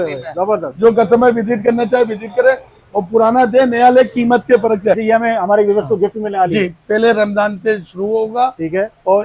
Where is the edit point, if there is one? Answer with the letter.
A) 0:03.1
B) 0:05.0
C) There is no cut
B